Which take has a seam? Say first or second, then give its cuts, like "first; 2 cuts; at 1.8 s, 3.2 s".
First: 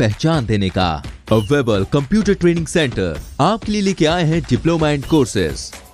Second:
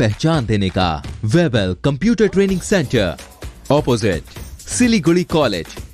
second; 1 cut; at 1.1 s